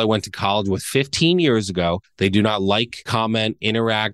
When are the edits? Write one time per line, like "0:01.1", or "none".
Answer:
0:02.1
0:03.0